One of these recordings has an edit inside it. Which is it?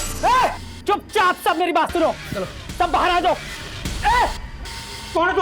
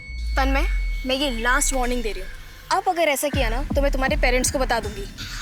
first; 1 cut; at 3.5 s

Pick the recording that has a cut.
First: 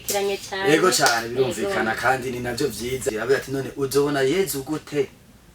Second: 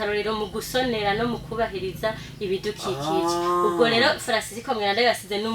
first; 1 cut; at 3.0 s

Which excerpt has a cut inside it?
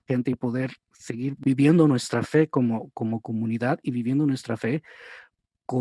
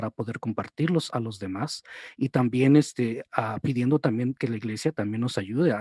first; 1 cut; at 1.4 s

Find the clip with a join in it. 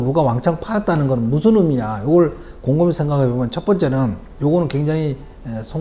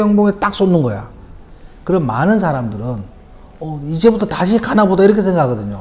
first; 1 cut; at 4.3 s

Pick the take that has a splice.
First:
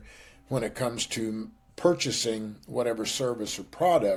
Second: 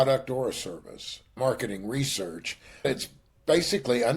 second; 2 cuts; at 1.3 s, 2.9 s

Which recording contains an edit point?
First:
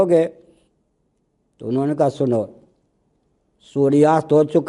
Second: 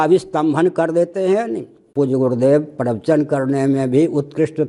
second; 1 cut; at 1.9 s

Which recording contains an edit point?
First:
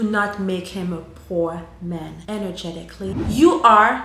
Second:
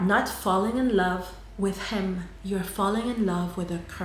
first; 2 cuts; at 2.2 s, 3.2 s

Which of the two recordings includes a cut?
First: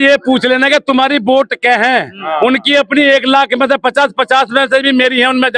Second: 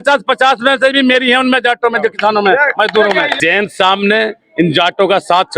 second; 1 cut; at 3.3 s

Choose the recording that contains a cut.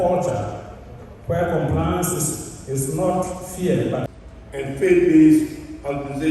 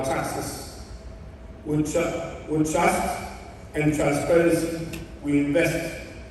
first; 1 cut; at 4.0 s

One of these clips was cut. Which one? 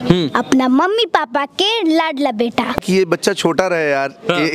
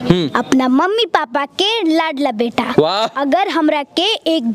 first; 1 cut; at 2.7 s

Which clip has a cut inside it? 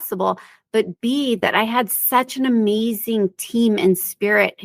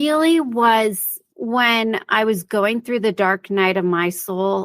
second; 1 cut; at 1.2 s

